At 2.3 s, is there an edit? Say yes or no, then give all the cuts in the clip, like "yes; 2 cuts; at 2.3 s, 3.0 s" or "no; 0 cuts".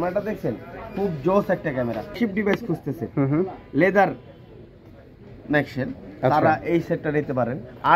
yes; 1 cut; at 2.3 s